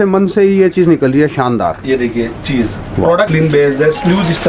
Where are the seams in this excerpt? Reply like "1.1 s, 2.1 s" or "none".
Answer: 3.3 s